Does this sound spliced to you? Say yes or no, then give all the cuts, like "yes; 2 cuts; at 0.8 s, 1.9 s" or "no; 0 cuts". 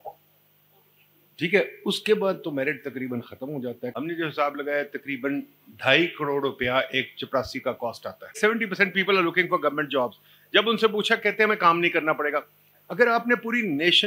yes; 2 cuts; at 3.9 s, 8.4 s